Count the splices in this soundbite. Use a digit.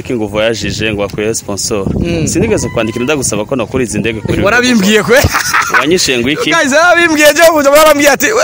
0